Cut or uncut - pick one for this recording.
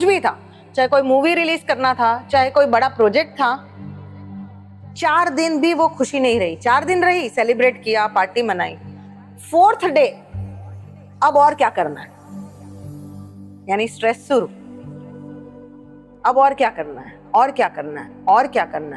uncut